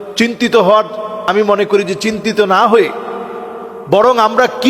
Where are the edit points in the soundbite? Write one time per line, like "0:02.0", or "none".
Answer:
0:01.2